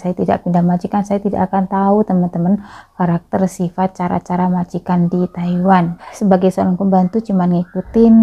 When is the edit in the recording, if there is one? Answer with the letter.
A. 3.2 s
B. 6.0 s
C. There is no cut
B